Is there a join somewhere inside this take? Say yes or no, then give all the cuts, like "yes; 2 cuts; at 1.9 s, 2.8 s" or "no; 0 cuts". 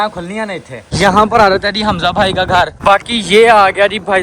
yes; 2 cuts; at 0.9 s, 2.8 s